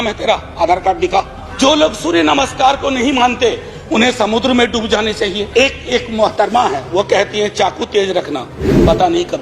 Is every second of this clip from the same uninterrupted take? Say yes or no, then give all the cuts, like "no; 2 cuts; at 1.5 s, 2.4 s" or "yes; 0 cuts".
no; 2 cuts; at 1.4 s, 5.4 s